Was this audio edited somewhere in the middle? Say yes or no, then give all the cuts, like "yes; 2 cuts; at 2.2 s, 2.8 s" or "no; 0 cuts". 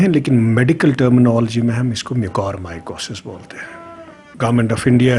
yes; 1 cut; at 4.2 s